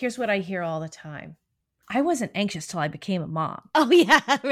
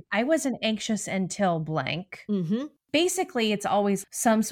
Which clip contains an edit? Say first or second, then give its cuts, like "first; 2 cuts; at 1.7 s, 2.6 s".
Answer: first; 1 cut; at 3.6 s